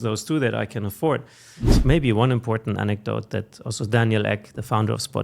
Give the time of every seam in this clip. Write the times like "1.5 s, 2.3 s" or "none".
1.6 s